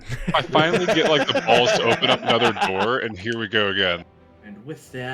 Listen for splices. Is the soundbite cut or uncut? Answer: cut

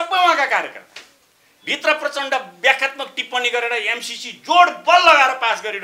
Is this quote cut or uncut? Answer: uncut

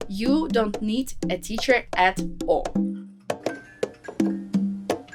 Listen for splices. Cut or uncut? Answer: cut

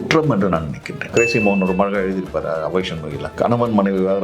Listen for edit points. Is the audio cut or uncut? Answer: cut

